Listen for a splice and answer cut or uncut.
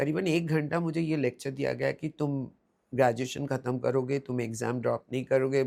uncut